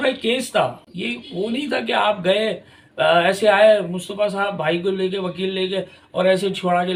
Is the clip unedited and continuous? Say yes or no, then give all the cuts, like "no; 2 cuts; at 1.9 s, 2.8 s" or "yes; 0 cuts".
yes; 0 cuts